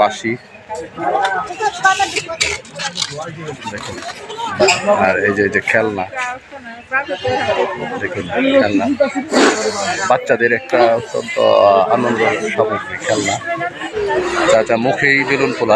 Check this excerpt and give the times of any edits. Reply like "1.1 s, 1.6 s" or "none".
4.8 s, 13.8 s